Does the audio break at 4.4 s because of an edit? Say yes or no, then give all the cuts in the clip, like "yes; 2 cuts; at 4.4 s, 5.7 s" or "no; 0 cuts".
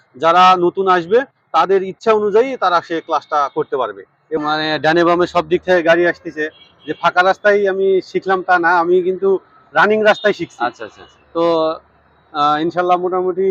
yes; 1 cut; at 4.4 s